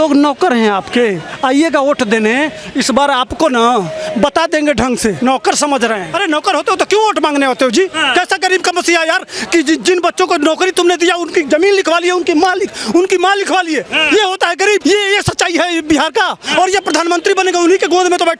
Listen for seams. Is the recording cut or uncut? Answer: cut